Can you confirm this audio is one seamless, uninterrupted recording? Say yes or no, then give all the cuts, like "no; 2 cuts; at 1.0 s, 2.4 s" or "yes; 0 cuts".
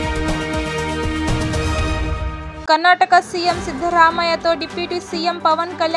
no; 1 cut; at 2.5 s